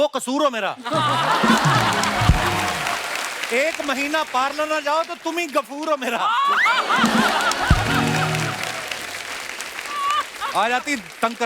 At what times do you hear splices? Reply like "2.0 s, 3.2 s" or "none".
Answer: none